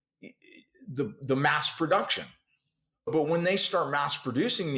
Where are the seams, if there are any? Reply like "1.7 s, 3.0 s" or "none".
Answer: 3.1 s